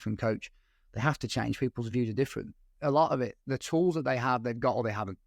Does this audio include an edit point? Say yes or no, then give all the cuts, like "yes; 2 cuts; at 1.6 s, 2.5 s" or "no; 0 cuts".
yes; 1 cut; at 2.6 s